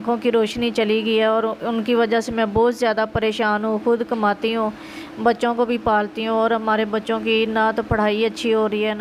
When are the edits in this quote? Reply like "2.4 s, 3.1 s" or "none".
none